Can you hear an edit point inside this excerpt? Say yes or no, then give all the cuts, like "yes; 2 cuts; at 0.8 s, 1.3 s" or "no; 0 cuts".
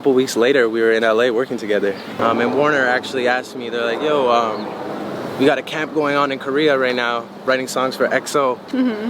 yes; 1 cut; at 2.2 s